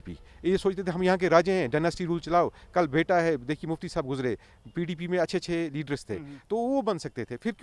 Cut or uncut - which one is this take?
uncut